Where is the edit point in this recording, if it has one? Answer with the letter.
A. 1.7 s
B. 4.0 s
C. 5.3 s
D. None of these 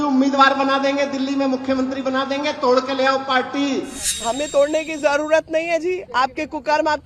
B